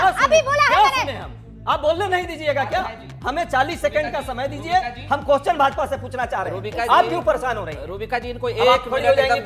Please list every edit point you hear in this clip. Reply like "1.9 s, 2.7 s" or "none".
1.5 s